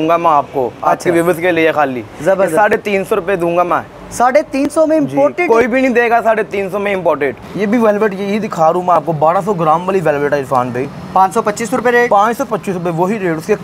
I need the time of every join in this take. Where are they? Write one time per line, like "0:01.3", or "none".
0:07.4